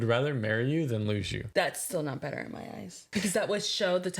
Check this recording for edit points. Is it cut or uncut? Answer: cut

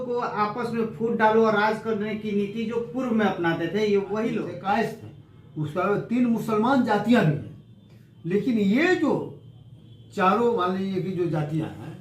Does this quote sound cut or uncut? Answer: cut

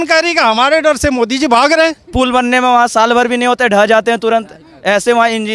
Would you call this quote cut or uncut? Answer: cut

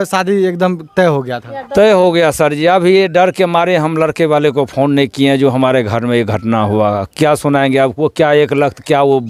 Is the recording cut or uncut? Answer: uncut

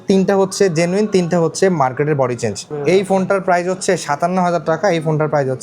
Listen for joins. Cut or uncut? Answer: cut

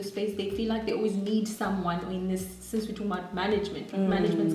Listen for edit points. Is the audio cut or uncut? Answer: uncut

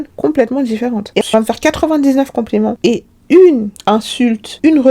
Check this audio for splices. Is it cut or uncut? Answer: cut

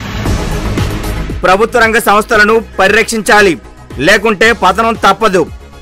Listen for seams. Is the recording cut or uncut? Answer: uncut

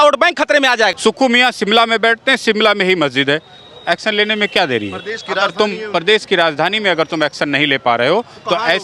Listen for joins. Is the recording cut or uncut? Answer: cut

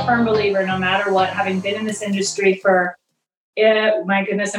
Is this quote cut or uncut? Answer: uncut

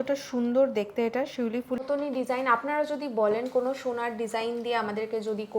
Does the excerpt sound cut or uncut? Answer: cut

